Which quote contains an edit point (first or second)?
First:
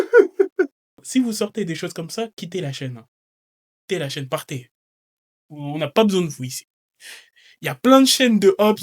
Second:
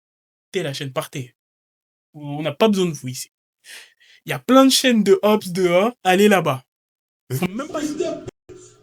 first